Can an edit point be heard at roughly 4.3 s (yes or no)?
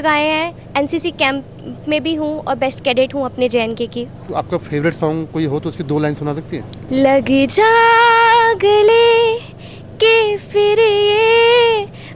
yes